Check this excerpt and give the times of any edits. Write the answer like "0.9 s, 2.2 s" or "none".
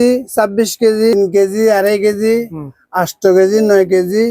1.1 s